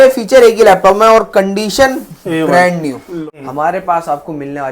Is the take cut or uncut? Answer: cut